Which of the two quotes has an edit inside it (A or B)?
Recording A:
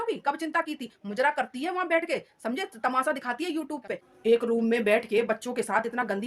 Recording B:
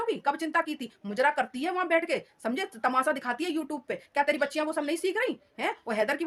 A